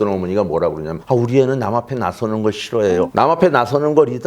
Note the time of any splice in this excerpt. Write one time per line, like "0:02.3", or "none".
0:03.1